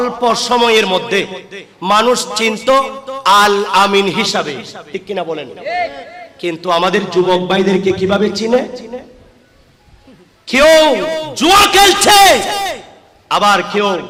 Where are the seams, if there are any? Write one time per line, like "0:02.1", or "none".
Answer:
none

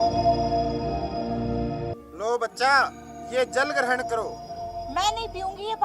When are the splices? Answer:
0:01.9

